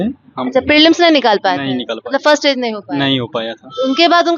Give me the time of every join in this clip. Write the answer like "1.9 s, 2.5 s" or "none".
none